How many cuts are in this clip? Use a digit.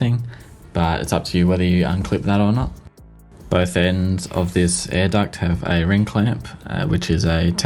0